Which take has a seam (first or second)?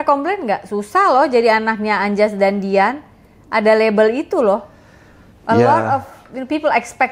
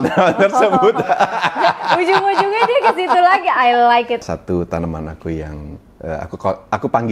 second